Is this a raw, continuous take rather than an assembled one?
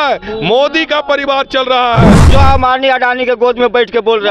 no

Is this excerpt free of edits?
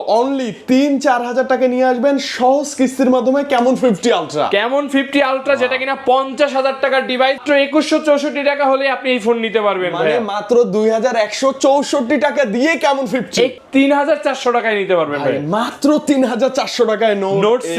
no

